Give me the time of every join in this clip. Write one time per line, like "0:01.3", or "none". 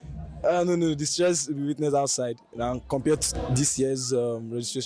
none